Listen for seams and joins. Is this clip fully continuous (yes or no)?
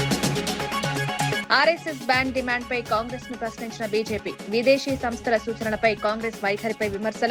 no